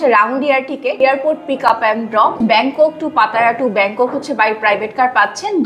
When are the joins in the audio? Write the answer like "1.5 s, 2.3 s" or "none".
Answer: 1.0 s, 2.4 s